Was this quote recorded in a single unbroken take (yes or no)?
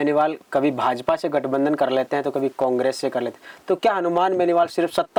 yes